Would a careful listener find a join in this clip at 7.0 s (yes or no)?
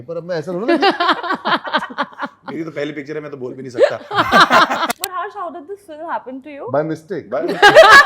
no